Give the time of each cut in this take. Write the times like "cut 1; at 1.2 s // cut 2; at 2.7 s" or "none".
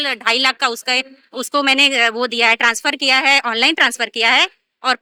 none

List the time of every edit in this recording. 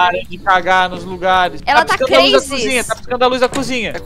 cut 1; at 1.6 s

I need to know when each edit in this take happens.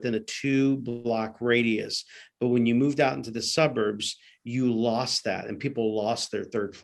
none

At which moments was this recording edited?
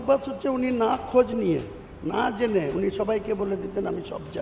none

